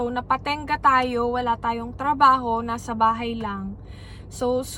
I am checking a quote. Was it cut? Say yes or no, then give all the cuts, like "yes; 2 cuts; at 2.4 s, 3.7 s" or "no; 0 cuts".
no; 0 cuts